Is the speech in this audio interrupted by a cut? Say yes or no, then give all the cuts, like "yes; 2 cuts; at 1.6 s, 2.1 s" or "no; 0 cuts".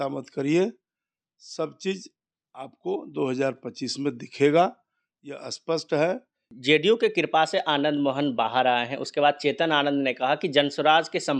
yes; 1 cut; at 6.5 s